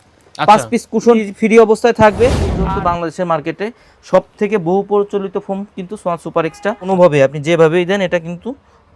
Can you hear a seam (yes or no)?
yes